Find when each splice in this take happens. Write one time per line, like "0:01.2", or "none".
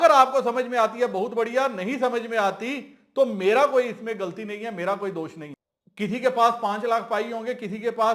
0:05.5